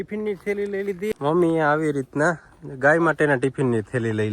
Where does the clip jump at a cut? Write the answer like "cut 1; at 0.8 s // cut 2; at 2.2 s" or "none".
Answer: cut 1; at 1.1 s